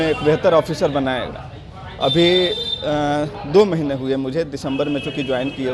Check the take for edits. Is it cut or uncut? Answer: uncut